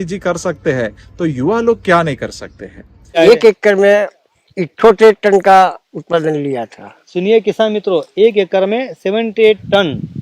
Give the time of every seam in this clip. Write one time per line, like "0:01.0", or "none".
0:03.2

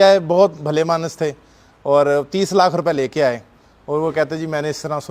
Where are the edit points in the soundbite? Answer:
none

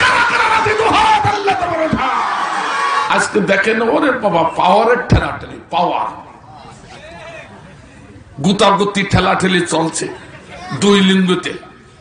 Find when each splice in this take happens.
0:03.0

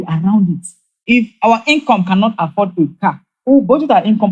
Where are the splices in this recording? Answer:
0:00.9

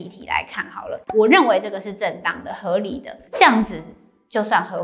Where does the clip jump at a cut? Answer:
0:01.0

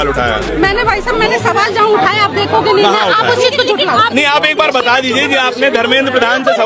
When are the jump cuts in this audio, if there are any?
none

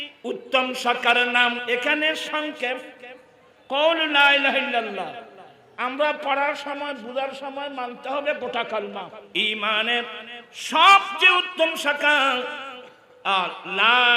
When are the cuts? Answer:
0:01.6
0:09.2

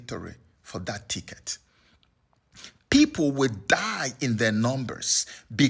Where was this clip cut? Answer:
none

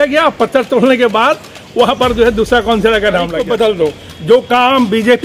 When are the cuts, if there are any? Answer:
0:03.4

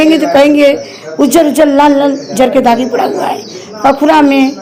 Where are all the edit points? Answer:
none

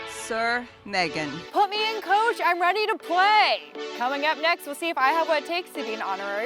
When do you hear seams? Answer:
0:01.4
0:03.8

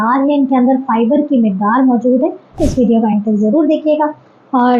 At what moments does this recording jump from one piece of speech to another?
0:02.6

